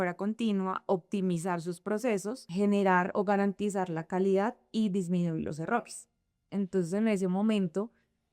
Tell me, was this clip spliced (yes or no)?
yes